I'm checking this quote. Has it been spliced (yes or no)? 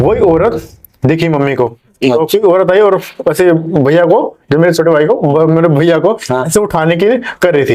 no